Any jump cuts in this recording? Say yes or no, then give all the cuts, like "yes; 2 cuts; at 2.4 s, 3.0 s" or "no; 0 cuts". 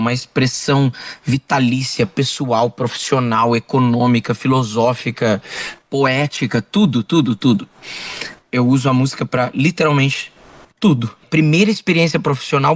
yes; 1 cut; at 11.3 s